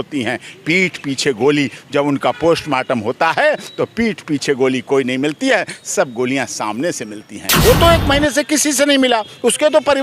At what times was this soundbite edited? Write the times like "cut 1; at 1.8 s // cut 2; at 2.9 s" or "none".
cut 1; at 7.6 s